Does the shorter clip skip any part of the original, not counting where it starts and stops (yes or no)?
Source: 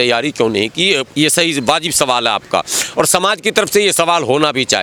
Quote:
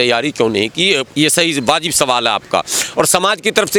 no